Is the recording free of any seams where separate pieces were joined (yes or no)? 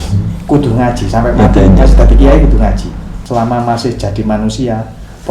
no